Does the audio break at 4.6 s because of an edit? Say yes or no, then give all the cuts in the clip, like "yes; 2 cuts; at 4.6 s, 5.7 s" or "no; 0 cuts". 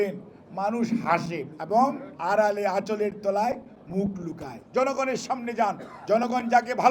yes; 2 cuts; at 1.8 s, 4.6 s